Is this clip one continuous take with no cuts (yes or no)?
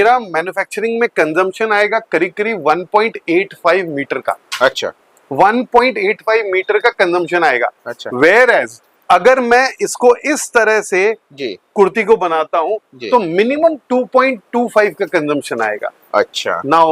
yes